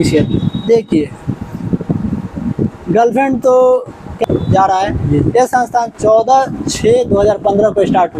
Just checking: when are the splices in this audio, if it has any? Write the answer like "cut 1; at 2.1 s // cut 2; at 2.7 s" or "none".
cut 1; at 4.2 s